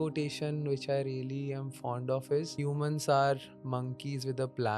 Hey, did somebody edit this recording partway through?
yes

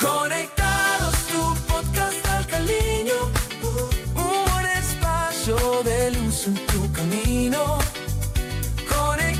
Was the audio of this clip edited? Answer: no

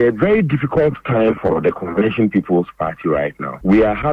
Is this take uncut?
yes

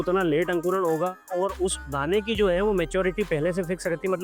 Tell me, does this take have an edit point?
no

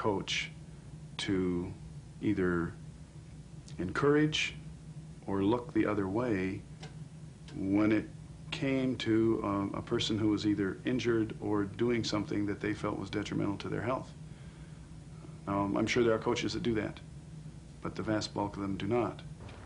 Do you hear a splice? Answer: yes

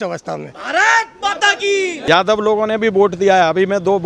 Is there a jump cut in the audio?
yes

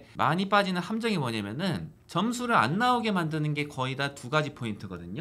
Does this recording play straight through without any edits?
yes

